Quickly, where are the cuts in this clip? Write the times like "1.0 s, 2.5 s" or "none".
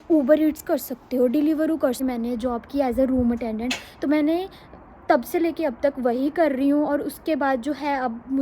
2.0 s